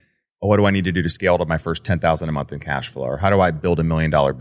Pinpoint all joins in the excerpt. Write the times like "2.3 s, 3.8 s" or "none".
none